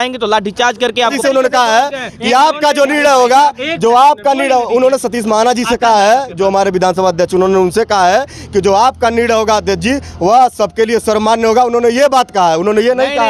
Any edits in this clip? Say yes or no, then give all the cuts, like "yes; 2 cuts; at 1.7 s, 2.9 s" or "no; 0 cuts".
yes; 1 cut; at 1.2 s